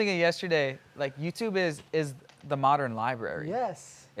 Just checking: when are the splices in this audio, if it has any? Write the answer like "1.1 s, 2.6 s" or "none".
none